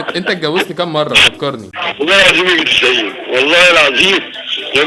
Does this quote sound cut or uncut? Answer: uncut